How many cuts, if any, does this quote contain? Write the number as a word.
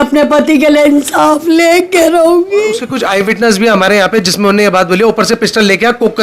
one